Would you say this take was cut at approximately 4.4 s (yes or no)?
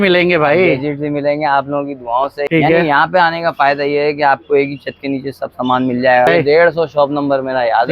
no